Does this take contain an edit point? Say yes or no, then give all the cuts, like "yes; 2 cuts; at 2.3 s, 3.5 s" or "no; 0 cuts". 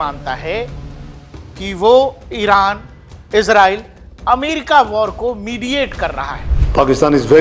no; 0 cuts